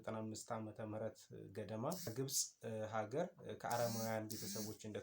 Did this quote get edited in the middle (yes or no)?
yes